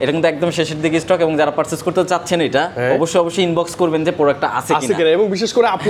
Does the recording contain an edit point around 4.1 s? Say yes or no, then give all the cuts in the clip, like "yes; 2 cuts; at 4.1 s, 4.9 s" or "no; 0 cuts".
no; 0 cuts